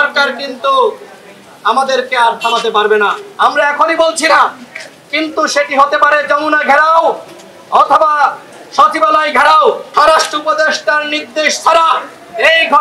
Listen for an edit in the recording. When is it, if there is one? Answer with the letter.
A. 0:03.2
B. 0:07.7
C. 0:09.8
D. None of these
C